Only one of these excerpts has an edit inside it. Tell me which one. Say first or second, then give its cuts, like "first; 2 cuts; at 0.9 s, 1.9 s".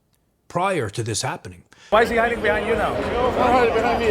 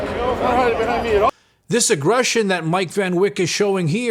first; 1 cut; at 1.8 s